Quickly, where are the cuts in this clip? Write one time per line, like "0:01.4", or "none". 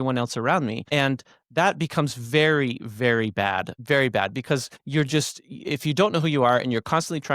0:00.8
0:03.7
0:04.8